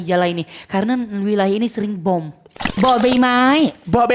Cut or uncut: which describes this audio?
cut